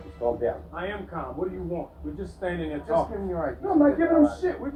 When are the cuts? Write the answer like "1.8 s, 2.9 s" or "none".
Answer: none